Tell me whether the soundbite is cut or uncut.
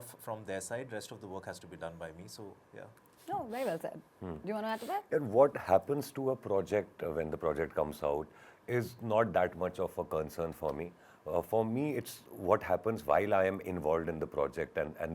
uncut